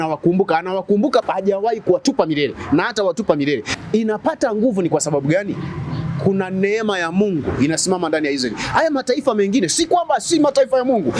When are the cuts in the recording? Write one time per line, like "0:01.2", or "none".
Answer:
0:01.3
0:03.7